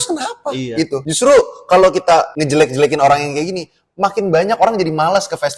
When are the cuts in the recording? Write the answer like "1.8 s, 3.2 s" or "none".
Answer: 1.1 s, 2.3 s